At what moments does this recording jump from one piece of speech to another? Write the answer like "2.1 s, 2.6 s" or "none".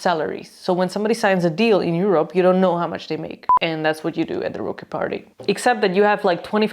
3.5 s